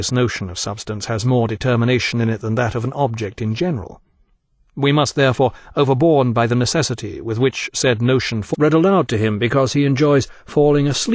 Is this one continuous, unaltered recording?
yes; 0 cuts

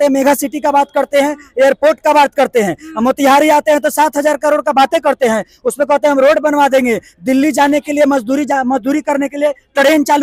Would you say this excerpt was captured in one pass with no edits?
yes; 0 cuts

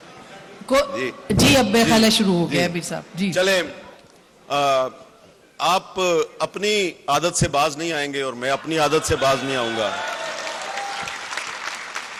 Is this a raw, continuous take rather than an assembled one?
yes; 0 cuts

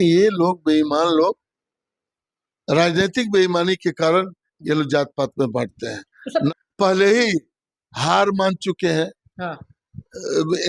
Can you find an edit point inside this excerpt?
yes; 1 cut; at 6.5 s

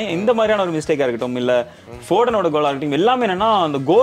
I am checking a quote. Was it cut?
yes; 1 cut; at 1.8 s

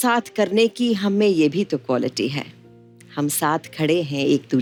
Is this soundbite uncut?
yes; 0 cuts

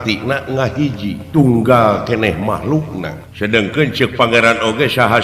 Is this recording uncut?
no; 2 cuts; at 1.2 s, 3.2 s

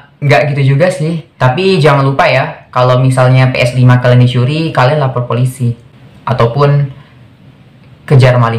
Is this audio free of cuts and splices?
no; 1 cut; at 1.3 s

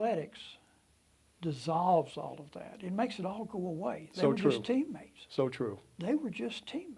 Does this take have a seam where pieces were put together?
no; 0 cuts

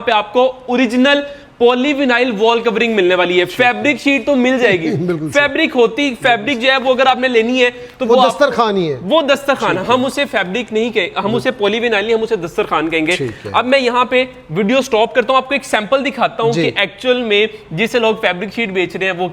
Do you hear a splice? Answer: no; 0 cuts

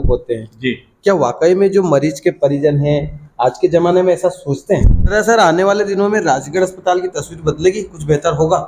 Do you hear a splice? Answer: yes; 1 cut; at 5.1 s

